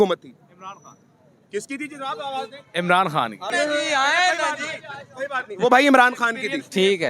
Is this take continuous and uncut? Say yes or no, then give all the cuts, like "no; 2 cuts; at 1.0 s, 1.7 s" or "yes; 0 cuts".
yes; 0 cuts